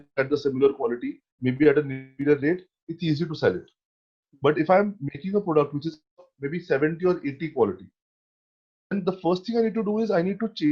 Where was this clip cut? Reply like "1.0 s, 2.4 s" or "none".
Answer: none